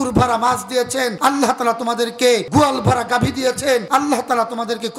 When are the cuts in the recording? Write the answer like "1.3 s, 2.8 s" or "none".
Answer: 1.1 s, 2.5 s, 3.9 s